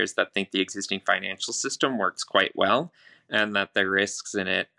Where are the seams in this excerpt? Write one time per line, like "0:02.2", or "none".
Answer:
none